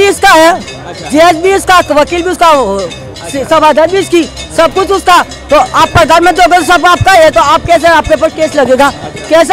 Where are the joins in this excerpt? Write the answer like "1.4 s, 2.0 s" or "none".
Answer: none